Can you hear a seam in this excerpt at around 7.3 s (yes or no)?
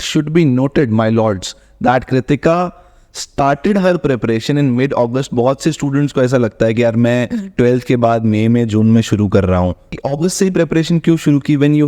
no